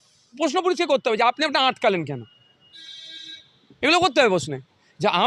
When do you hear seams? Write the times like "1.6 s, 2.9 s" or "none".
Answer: none

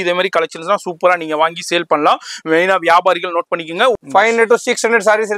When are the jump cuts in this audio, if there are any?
4.0 s

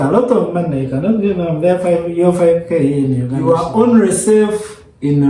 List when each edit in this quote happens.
3.4 s

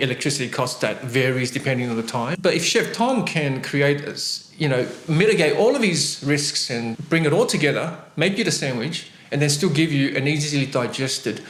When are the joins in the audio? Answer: none

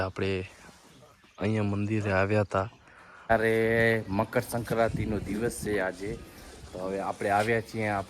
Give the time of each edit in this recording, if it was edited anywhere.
3.3 s

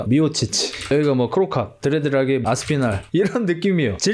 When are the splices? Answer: 0.8 s, 3.0 s

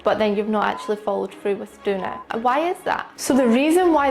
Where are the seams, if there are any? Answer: 3.1 s

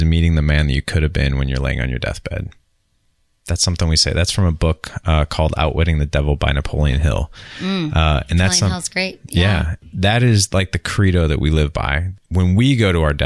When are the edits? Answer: 9.8 s, 12.2 s

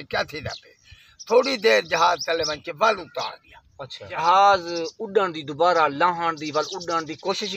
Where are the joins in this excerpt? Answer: 4.2 s

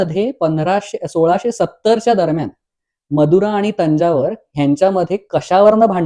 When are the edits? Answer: none

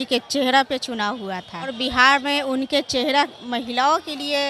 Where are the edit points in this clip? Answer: 1.7 s, 3.4 s

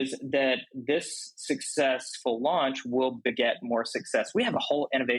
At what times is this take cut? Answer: none

